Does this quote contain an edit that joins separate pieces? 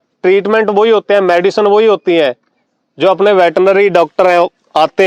no; 0 cuts

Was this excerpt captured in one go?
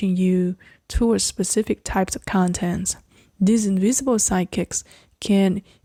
yes; 0 cuts

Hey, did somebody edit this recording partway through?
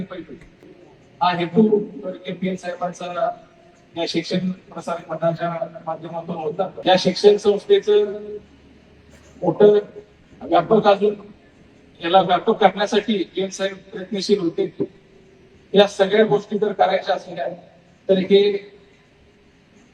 yes; 1 cut; at 6.8 s

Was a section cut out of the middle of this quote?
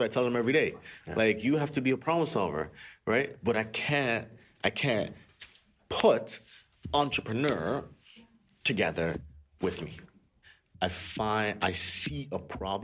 yes; 1 cut; at 10.3 s

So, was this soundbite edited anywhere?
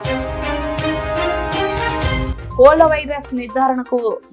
yes; 1 cut; at 2.3 s

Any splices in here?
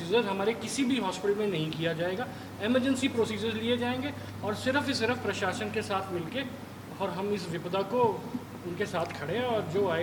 no; 0 cuts

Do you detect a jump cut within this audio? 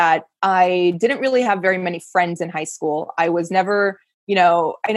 no; 0 cuts

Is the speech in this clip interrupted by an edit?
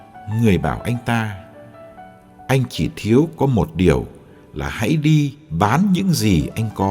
yes; 1 cut; at 5.2 s

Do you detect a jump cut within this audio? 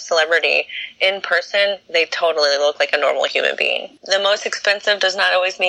yes; 1 cut; at 4.0 s

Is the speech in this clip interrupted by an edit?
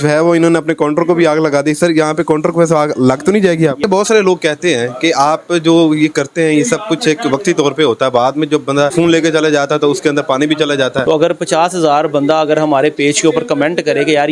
yes; 3 cuts; at 3.8 s, 8.9 s, 11.0 s

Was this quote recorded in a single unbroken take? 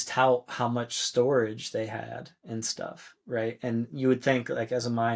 yes; 0 cuts

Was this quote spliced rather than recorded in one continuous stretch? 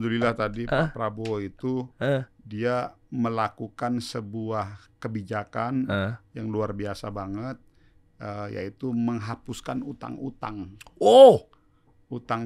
no; 0 cuts

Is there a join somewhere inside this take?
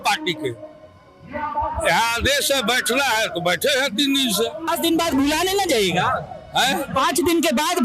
yes; 1 cut; at 4.7 s

